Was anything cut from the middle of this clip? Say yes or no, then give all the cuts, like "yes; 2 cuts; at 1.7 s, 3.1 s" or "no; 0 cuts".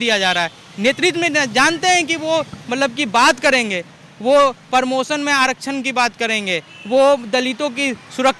no; 0 cuts